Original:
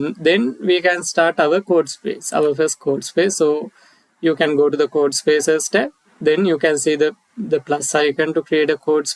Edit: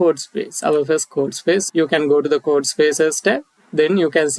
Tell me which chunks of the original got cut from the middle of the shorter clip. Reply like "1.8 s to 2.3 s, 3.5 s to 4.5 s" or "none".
3.3 s to 4.1 s